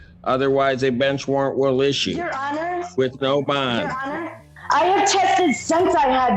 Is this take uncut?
no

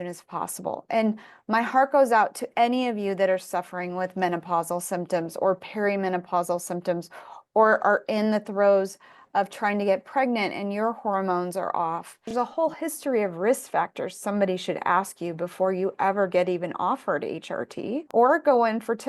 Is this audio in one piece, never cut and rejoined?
no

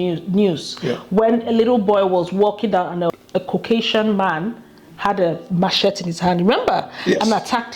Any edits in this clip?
yes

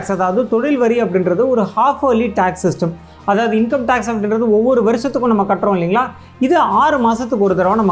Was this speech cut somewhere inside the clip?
no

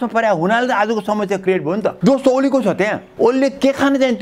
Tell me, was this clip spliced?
yes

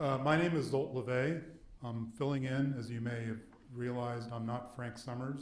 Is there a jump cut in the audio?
yes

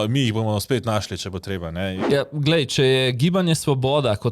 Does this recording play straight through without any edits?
no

